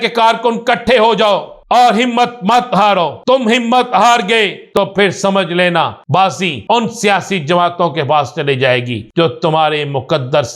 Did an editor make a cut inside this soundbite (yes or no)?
yes